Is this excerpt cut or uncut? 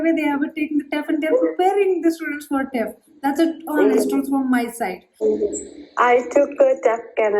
cut